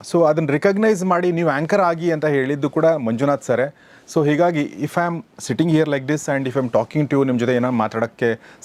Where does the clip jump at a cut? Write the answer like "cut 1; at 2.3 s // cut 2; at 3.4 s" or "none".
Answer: none